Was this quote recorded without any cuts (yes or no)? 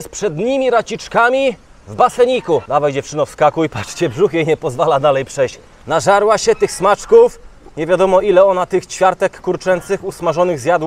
yes